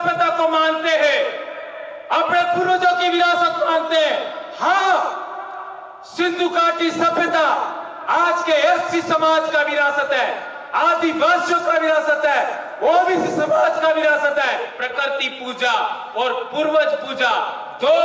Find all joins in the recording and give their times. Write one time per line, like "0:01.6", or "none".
0:14.8